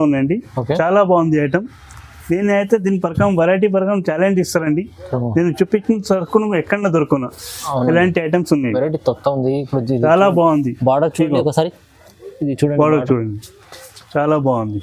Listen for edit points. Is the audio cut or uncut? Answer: uncut